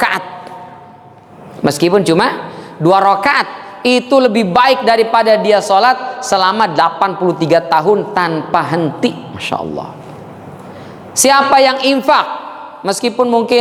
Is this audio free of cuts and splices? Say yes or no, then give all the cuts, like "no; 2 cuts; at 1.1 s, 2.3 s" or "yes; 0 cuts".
yes; 0 cuts